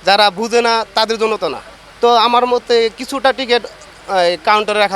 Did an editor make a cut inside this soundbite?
no; 0 cuts

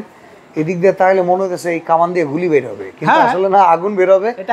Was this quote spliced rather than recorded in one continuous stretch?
no; 0 cuts

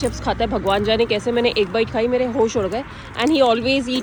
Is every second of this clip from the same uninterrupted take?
yes; 0 cuts

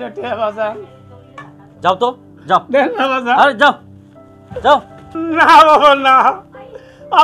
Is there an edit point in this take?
yes; 1 cut; at 5.0 s

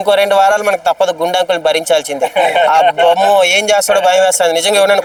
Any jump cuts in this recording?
no; 0 cuts

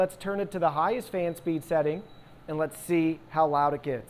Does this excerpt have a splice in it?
no; 0 cuts

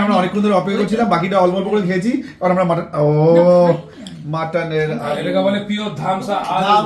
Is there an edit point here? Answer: no; 0 cuts

